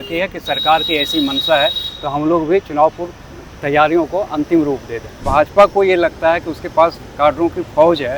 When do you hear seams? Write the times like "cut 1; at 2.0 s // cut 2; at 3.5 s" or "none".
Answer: cut 1; at 5.2 s